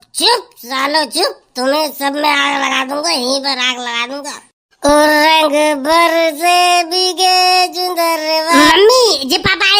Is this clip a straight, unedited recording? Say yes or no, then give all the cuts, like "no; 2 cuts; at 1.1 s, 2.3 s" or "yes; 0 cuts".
no; 1 cut; at 8.6 s